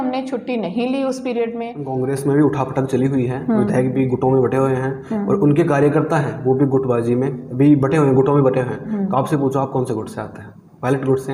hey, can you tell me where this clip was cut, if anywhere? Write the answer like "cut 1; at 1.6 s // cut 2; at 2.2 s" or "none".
cut 1; at 1.8 s